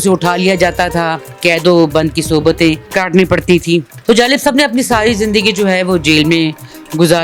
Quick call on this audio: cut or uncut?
cut